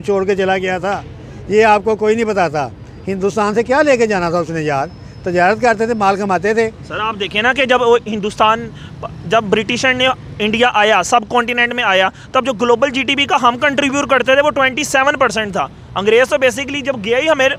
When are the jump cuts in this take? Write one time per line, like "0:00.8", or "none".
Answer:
none